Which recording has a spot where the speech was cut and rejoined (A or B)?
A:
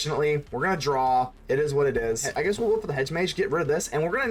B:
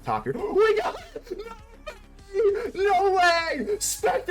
A